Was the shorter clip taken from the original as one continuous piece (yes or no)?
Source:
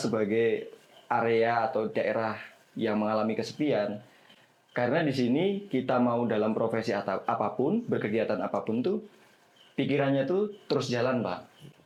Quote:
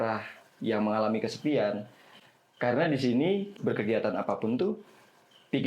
no